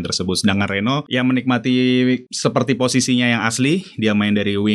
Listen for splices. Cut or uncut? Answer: cut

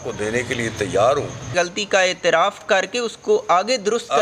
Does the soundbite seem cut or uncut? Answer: cut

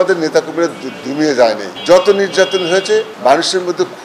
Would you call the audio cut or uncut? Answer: cut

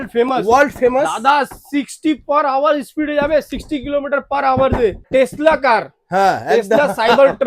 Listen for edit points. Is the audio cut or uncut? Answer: cut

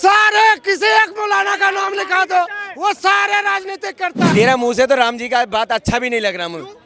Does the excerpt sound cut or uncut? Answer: cut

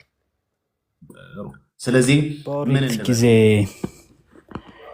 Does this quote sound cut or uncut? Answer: cut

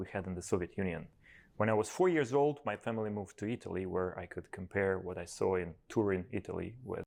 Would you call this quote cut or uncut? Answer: uncut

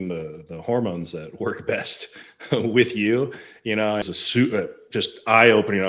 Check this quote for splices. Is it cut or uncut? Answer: cut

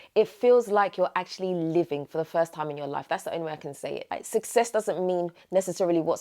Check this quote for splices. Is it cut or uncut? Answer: cut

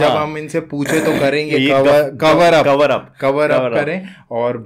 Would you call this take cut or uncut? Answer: uncut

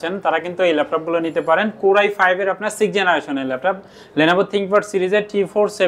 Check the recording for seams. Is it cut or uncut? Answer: uncut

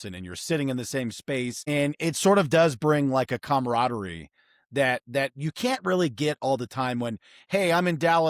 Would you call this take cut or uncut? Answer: cut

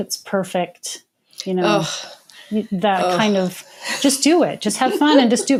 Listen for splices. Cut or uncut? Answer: uncut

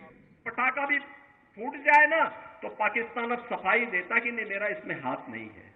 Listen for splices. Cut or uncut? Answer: uncut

